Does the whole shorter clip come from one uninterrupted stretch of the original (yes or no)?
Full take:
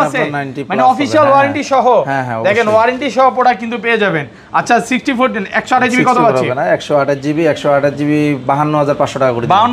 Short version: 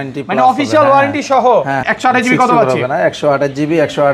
no